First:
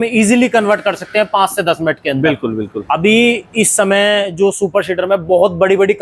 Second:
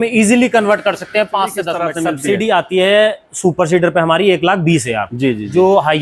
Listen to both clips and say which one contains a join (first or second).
second